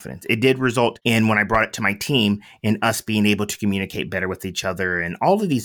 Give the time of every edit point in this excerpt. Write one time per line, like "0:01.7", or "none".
0:01.0